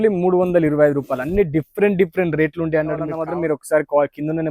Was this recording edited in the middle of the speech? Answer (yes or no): yes